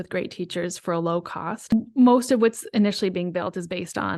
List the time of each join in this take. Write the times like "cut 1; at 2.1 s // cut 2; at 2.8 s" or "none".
cut 1; at 1.7 s